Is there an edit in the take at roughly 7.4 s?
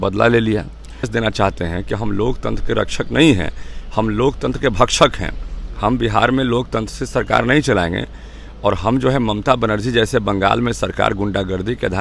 no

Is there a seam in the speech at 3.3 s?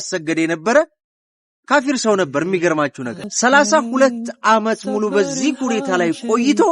yes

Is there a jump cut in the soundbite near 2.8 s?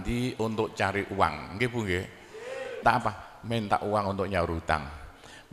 yes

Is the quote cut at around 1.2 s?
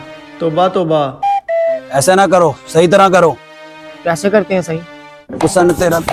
no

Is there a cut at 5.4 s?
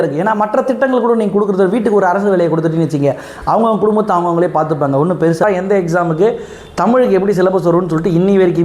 yes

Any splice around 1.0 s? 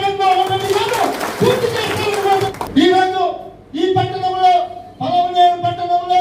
no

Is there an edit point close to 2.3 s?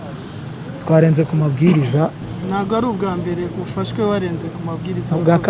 yes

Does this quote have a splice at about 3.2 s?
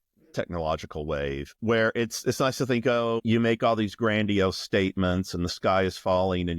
yes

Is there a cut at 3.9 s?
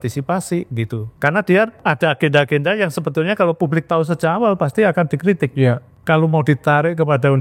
no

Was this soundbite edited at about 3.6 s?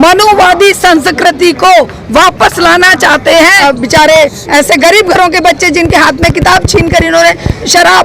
yes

